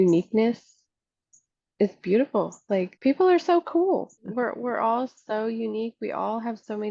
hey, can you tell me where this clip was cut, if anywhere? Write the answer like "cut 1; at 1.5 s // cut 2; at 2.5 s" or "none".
cut 1; at 2.9 s // cut 2; at 4.2 s